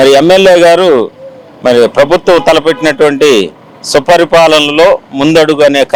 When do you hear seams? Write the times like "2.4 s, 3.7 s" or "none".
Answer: none